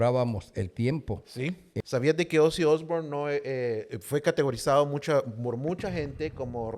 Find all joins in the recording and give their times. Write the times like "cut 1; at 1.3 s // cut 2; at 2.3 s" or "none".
cut 1; at 1.7 s